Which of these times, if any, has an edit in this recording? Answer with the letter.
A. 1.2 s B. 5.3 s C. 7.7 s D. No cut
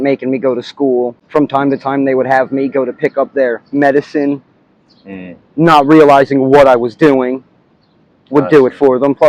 A